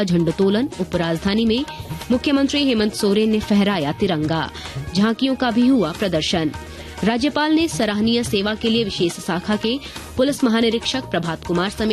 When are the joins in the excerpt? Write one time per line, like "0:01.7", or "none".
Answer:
none